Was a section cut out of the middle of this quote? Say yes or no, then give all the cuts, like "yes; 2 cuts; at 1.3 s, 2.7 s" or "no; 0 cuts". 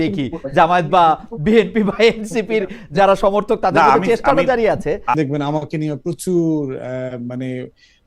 yes; 1 cut; at 5.1 s